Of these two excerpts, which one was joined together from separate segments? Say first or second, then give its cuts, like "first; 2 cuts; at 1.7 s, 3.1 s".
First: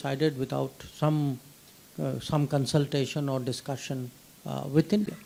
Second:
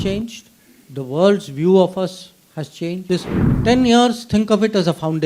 second; 1 cut; at 3.0 s